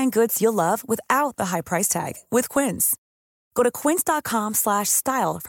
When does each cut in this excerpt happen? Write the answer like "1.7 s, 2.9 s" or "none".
none